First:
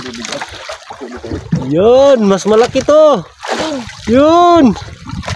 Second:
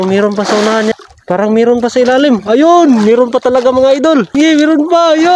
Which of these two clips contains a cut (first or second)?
second